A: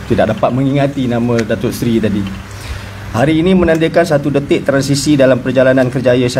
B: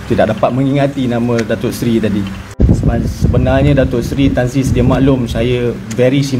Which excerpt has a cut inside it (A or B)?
B